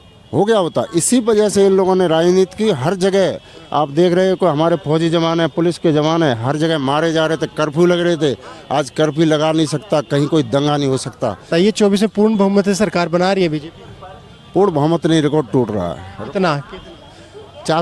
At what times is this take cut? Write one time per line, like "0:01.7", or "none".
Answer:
0:11.4